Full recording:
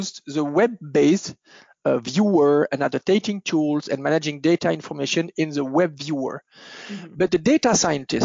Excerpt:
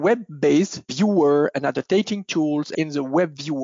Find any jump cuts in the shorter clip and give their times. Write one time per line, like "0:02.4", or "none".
0:00.9
0:02.7